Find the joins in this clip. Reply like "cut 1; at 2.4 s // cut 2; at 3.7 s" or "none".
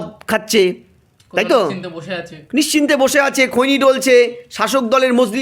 none